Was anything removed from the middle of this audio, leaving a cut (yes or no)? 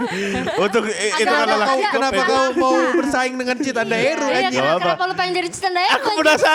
no